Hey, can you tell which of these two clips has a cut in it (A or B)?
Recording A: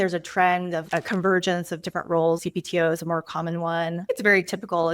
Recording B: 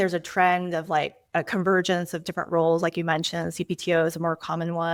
A